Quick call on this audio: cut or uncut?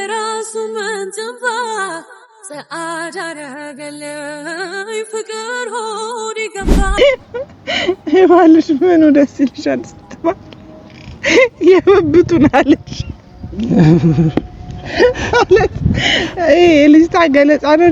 cut